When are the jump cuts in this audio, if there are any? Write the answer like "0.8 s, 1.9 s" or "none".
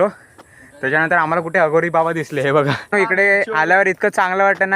2.8 s